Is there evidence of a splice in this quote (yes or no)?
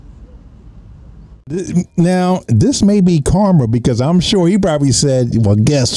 yes